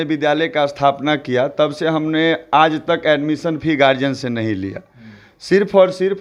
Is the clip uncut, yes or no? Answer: yes